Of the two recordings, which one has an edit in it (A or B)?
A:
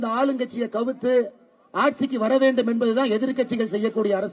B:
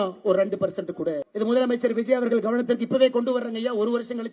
B